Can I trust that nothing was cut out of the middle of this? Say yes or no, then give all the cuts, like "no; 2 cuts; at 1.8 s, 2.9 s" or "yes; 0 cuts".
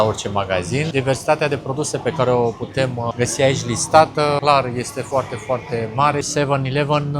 no; 4 cuts; at 0.9 s, 3.1 s, 4.6 s, 6.3 s